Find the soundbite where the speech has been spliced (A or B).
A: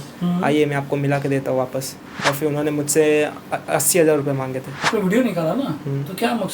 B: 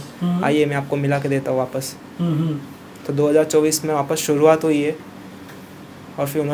A